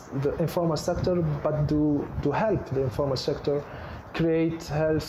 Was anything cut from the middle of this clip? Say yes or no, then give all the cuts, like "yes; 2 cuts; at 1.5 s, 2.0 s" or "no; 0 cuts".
no; 0 cuts